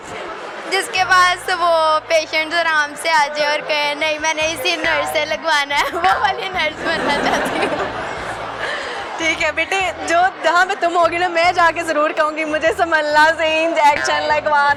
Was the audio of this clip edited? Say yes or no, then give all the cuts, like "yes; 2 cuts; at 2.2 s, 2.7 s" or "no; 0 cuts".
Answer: no; 0 cuts